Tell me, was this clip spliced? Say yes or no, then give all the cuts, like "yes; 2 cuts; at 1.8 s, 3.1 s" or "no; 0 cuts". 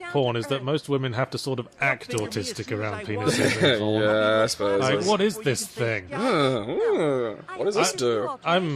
no; 0 cuts